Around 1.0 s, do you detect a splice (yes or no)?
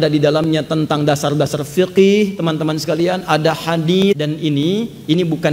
no